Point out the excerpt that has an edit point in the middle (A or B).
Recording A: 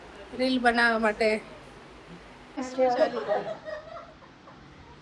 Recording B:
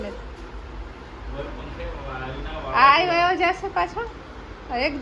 A